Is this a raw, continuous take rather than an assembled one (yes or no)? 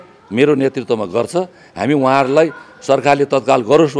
yes